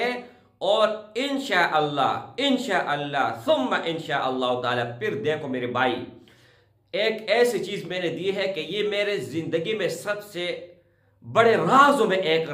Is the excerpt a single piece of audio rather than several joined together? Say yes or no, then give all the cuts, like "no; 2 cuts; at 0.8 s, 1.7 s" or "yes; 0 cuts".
yes; 0 cuts